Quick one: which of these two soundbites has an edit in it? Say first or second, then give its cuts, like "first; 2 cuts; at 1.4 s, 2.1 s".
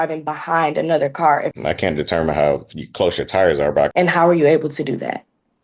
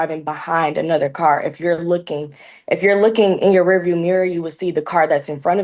first; 2 cuts; at 1.5 s, 3.9 s